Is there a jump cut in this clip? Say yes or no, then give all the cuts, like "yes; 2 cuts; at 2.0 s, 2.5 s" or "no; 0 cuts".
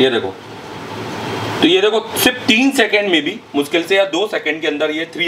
no; 0 cuts